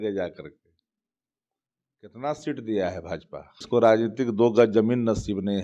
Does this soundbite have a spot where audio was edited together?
yes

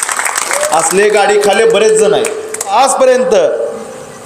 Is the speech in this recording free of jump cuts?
no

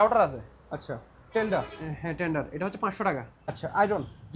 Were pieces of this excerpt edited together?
yes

